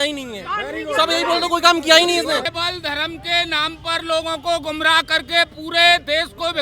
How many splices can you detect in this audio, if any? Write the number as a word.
one